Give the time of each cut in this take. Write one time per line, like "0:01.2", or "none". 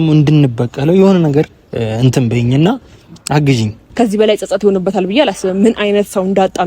0:03.8